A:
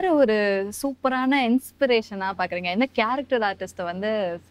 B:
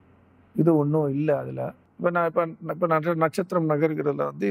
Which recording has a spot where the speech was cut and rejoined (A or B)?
B